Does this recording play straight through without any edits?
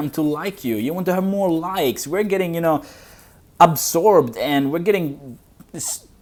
yes; 0 cuts

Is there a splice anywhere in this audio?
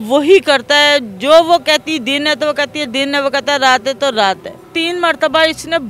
yes; 1 cut; at 4.7 s

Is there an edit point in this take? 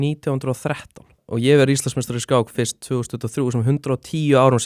yes; 1 cut; at 1.2 s

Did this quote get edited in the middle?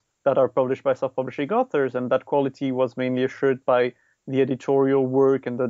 no; 0 cuts

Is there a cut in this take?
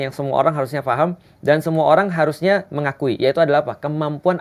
no; 0 cuts

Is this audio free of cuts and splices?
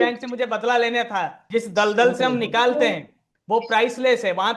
no; 1 cut; at 1.4 s

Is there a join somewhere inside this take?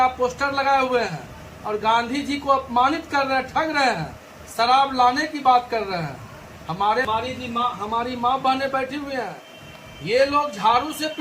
yes; 1 cut; at 7.0 s

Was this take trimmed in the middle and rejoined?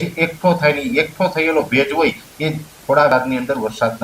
yes; 1 cut; at 3.1 s

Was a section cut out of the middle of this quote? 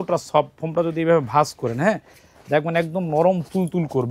no; 0 cuts

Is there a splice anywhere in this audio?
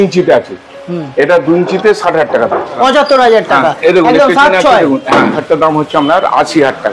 yes; 2 cuts; at 2.8 s, 5.4 s

